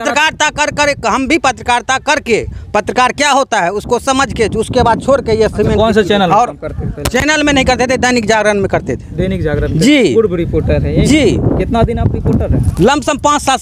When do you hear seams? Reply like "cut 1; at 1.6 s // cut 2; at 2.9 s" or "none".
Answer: cut 1; at 5.7 s